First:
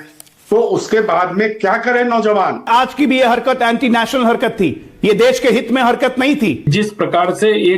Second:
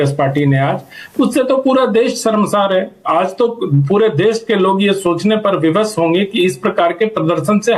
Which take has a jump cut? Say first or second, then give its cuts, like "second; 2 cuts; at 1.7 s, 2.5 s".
first; 2 cuts; at 2.7 s, 6.7 s